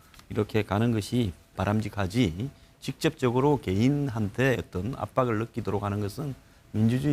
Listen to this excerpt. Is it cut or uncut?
uncut